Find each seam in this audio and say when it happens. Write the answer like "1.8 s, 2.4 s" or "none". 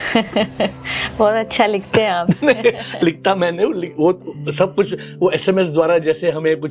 none